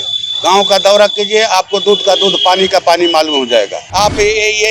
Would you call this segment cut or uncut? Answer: cut